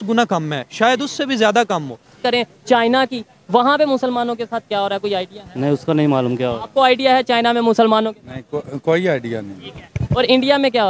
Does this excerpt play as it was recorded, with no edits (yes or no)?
no